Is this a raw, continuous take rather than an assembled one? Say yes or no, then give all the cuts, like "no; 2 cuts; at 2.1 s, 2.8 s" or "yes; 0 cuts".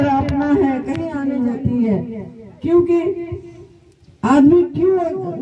no; 1 cut; at 1.1 s